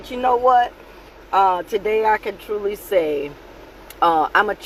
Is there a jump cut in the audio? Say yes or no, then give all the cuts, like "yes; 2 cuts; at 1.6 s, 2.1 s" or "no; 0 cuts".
no; 0 cuts